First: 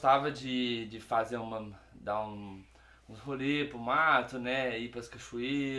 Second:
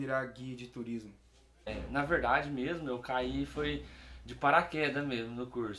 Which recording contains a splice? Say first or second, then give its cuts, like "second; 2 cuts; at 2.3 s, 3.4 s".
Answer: second; 1 cut; at 1.7 s